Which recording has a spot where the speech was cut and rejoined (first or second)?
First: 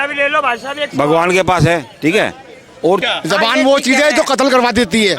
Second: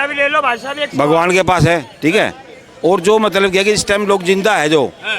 first